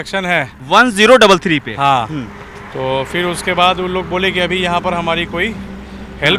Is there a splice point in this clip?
no; 0 cuts

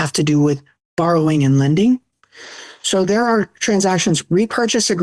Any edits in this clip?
no; 0 cuts

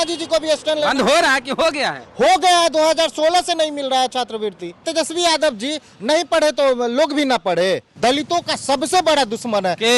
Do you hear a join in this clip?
yes; 2 cuts; at 4.8 s, 7.9 s

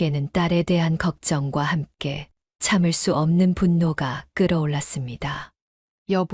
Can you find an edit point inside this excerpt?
no; 0 cuts

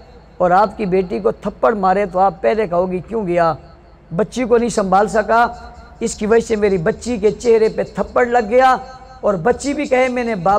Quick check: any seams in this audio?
no; 0 cuts

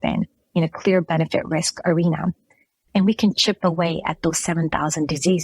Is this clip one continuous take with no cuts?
no; 1 cut; at 2.7 s

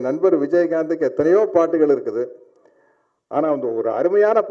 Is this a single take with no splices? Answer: yes; 0 cuts

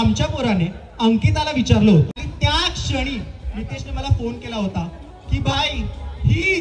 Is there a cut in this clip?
yes; 1 cut; at 2.2 s

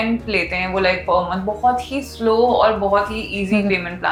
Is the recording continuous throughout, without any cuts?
yes; 0 cuts

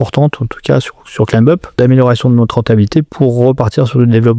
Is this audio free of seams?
no; 2 cuts; at 1.8 s, 3.1 s

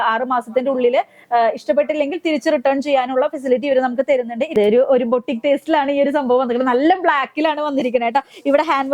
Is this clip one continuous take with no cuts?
no; 1 cut; at 4.4 s

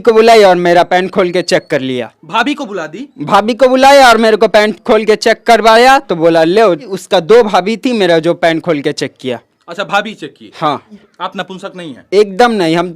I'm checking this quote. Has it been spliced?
yes; 2 cuts; at 7.0 s, 11.0 s

